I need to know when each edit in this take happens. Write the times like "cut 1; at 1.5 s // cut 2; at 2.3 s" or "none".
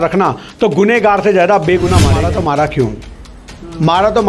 cut 1; at 2.2 s